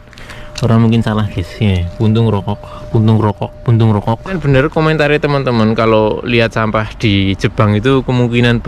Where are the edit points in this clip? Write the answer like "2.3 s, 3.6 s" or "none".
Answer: 4.4 s